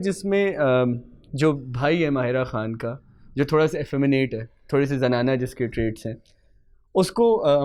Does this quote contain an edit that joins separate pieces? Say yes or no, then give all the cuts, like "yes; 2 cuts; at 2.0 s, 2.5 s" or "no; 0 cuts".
no; 0 cuts